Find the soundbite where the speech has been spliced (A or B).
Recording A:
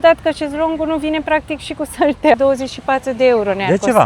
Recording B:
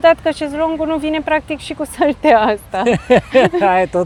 A